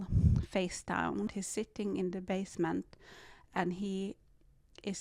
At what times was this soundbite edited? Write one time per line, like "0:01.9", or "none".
0:01.3